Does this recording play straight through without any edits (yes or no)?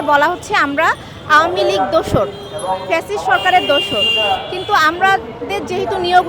yes